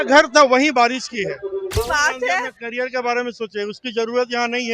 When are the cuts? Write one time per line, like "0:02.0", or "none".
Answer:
0:01.7

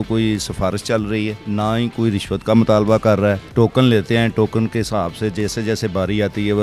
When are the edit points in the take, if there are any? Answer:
0:01.4
0:03.4

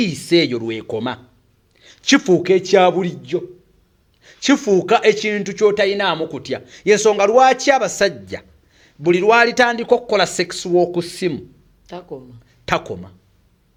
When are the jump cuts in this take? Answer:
none

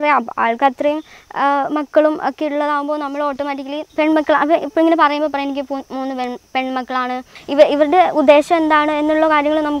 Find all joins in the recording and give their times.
0:03.8
0:07.4

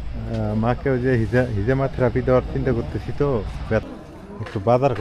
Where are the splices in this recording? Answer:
0:03.8

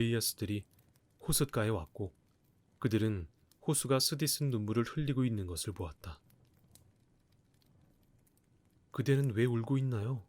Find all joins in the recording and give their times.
0:06.4
0:08.5

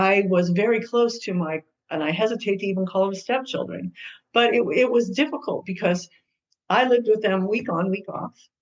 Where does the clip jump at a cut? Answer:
none

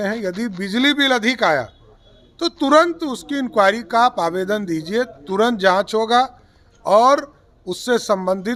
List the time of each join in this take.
none

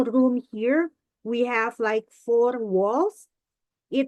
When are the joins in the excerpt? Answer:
none

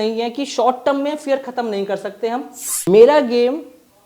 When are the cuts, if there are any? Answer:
0:02.9

